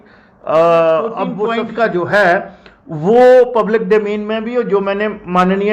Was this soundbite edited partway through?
yes; 1 cut; at 1.4 s

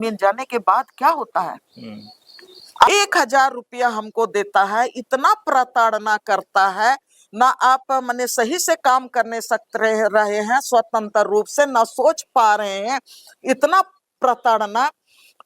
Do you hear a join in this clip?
yes; 1 cut; at 2.9 s

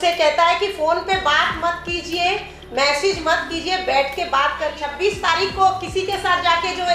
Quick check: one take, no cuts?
no; 1 cut; at 4.8 s

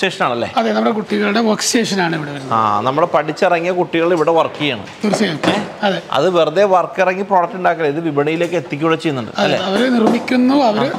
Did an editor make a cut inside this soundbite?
no; 0 cuts

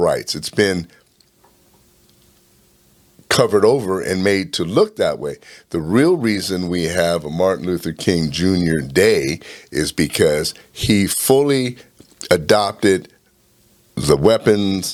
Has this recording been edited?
no; 0 cuts

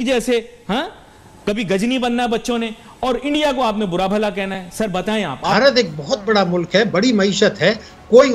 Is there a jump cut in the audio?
yes; 1 cut; at 5.5 s

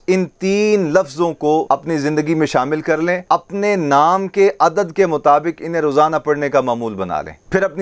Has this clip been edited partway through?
yes; 2 cuts; at 1.6 s, 3.2 s

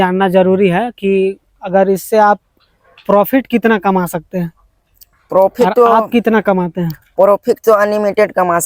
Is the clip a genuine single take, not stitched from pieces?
yes; 0 cuts

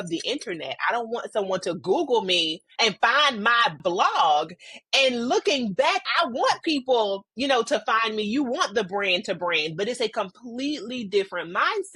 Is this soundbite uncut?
no; 2 cuts; at 2.6 s, 6.1 s

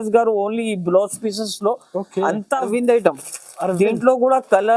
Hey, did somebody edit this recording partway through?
yes; 1 cut; at 2.7 s

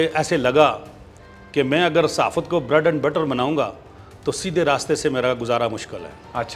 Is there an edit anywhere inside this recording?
no; 0 cuts

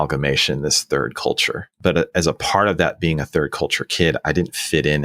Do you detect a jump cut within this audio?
yes; 1 cut; at 1.7 s

